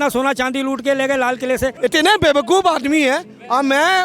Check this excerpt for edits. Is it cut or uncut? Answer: cut